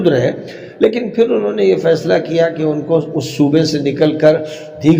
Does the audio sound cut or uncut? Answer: uncut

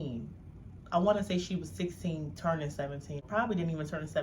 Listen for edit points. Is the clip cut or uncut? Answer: cut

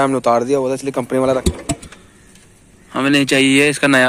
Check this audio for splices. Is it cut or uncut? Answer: cut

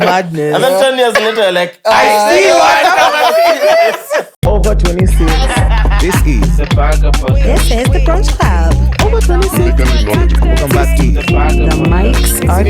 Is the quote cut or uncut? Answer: cut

